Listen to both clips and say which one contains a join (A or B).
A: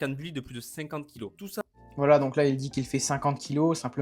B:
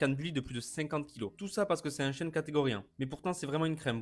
B